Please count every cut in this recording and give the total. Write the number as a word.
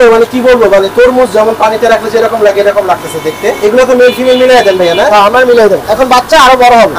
two